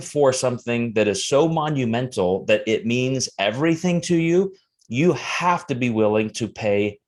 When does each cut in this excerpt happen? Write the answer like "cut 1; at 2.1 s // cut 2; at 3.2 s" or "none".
none